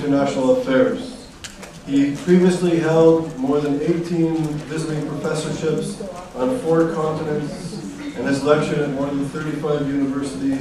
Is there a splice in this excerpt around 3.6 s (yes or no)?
yes